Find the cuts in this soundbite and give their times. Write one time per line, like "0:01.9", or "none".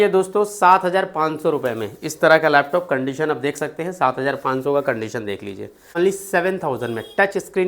0:05.9